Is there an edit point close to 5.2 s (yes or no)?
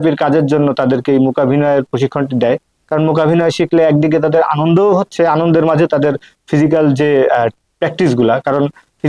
no